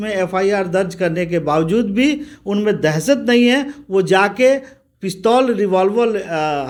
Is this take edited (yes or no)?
no